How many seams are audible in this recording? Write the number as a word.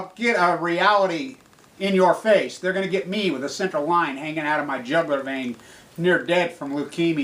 one